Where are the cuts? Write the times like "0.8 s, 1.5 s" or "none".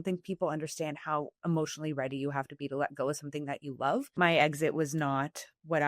4.1 s